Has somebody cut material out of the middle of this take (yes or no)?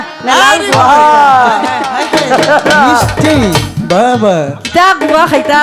no